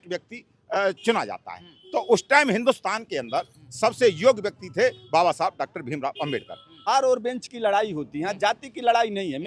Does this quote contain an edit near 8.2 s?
no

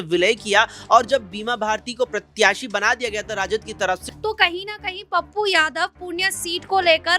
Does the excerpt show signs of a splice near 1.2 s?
no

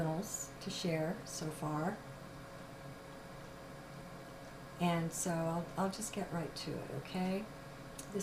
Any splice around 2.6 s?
no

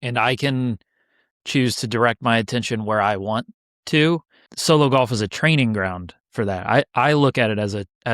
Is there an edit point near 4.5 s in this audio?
yes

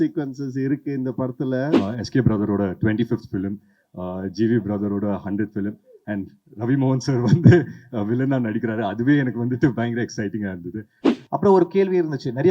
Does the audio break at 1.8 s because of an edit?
yes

